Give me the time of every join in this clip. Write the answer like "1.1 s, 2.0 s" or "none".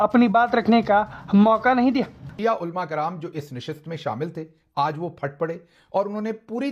2.2 s